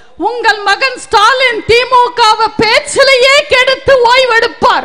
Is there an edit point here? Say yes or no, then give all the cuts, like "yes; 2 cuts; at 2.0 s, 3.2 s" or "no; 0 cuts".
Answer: no; 0 cuts